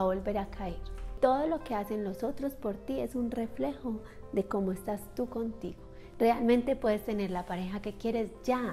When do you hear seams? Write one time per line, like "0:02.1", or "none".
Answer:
0:01.1
0:06.1